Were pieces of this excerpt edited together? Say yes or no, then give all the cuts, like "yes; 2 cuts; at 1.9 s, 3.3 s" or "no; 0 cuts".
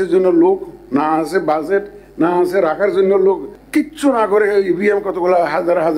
yes; 1 cut; at 3.5 s